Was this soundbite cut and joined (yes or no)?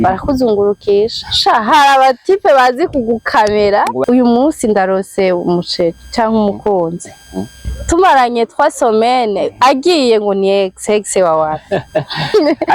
yes